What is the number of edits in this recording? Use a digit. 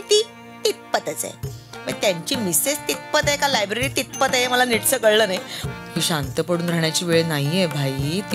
1